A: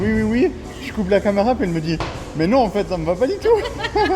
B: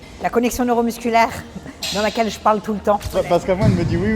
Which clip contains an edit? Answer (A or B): B